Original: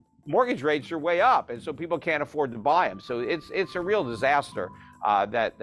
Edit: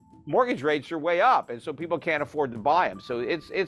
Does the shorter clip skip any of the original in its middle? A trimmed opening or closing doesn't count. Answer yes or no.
no